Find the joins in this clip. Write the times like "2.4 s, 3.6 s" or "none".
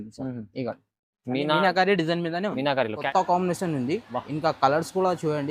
3.0 s